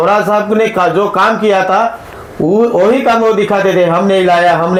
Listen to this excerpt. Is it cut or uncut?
uncut